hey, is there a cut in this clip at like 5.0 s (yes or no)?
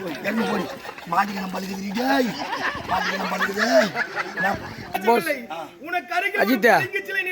yes